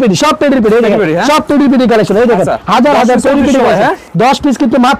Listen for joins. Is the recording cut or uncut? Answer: uncut